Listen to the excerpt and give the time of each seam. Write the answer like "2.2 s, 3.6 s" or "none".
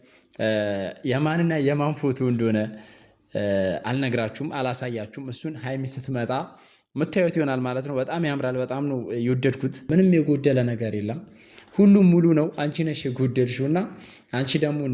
9.9 s